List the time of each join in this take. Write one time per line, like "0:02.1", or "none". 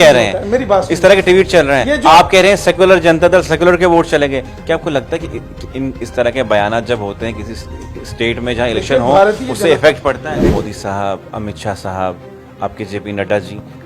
0:10.4

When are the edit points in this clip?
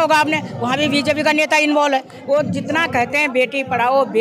0:02.1

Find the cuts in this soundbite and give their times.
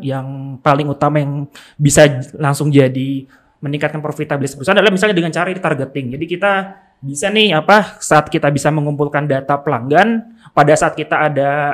none

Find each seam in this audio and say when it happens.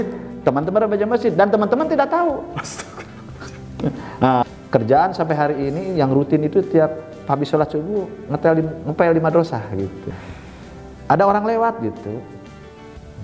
0:04.4
0:10.1

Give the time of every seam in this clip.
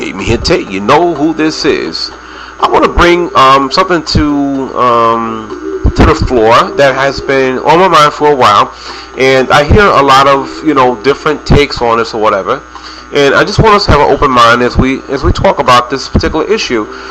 none

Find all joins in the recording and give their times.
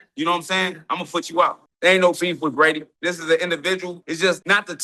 0:01.7
0:02.9
0:04.0

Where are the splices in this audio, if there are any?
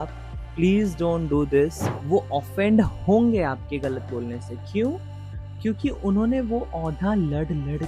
0:01.9

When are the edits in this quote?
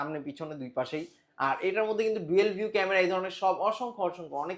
none

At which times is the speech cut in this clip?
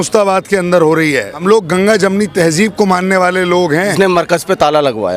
0:01.3
0:03.9

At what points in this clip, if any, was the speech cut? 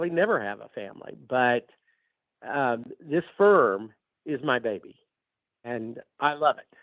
0:05.7

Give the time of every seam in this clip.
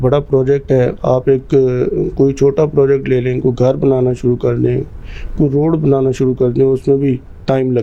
none

